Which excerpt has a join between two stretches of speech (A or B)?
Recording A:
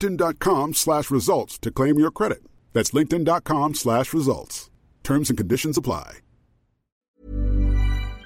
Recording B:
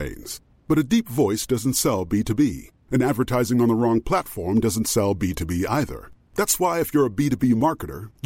A